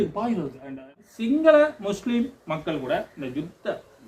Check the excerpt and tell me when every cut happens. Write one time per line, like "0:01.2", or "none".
0:00.9